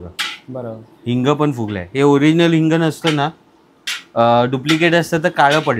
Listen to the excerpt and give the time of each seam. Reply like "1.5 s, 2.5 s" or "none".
none

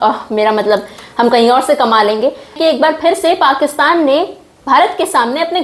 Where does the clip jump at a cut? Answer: 2.5 s

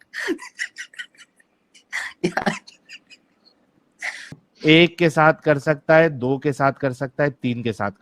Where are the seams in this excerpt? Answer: 4.4 s

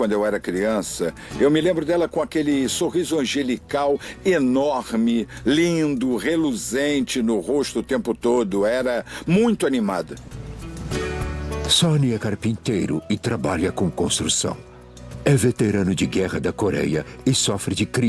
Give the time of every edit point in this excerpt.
9.7 s

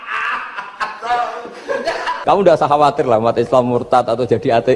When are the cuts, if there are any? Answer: 2.2 s

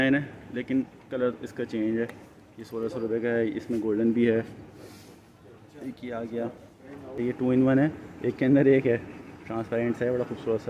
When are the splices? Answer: 7.2 s

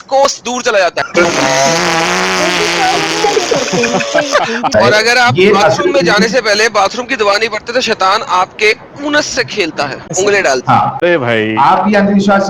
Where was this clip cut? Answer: 4.7 s, 11.0 s

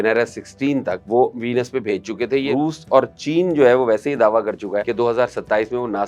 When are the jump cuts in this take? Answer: 1.0 s, 2.5 s, 4.9 s

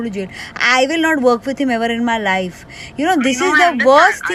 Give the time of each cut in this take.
none

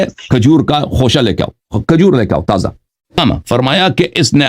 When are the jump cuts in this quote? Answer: 3.2 s

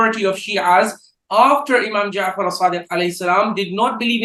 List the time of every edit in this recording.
none

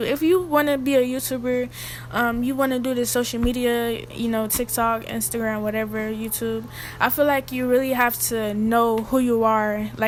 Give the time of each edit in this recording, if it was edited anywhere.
none

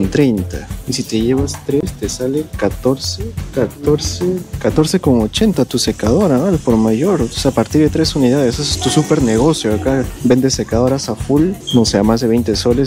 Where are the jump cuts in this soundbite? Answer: none

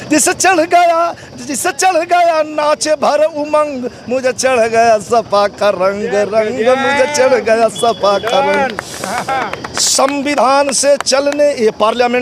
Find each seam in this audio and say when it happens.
none

